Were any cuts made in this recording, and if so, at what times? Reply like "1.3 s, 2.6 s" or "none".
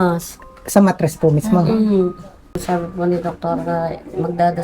2.6 s